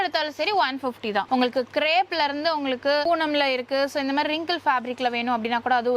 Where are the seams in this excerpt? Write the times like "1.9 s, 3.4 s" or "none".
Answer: 1.3 s, 3.0 s